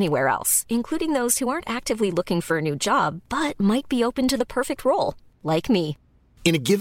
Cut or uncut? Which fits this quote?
uncut